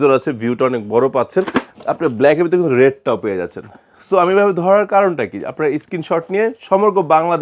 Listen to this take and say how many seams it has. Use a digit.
1